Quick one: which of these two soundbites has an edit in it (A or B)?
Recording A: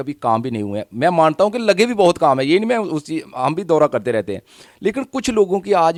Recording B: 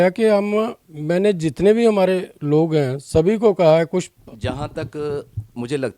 B